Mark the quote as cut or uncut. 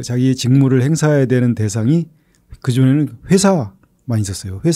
uncut